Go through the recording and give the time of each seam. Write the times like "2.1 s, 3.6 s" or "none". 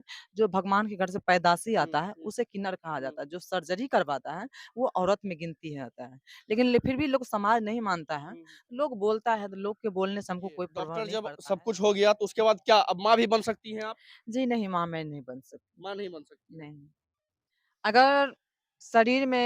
11.1 s